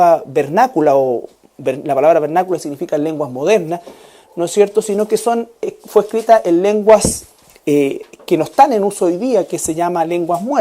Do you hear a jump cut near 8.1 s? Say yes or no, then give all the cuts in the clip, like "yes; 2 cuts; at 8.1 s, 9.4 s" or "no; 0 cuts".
yes; 1 cut; at 8.1 s